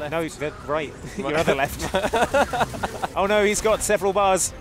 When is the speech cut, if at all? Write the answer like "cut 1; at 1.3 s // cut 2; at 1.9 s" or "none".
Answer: cut 1; at 3.0 s